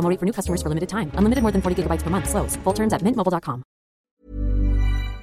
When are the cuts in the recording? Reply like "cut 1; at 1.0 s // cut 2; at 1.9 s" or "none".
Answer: cut 1; at 4.1 s